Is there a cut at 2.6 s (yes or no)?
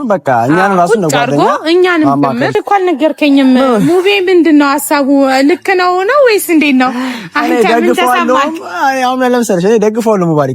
yes